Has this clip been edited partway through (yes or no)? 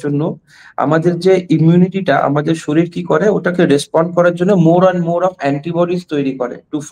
no